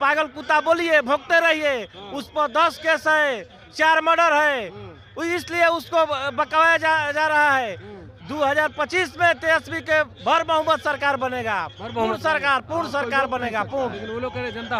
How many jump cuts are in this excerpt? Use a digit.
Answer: 0